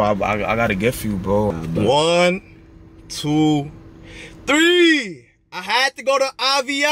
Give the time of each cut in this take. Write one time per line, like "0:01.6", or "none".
0:01.5